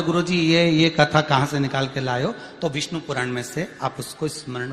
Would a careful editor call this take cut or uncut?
uncut